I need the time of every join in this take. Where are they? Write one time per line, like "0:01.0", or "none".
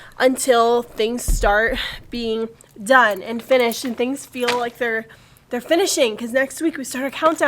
0:06.1

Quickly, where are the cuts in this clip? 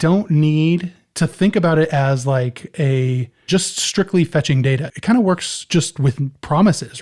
0:01.0
0:04.9

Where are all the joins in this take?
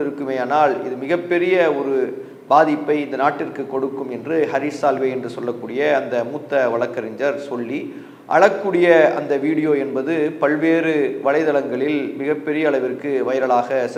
none

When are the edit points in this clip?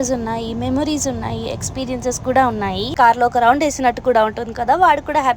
0:02.9

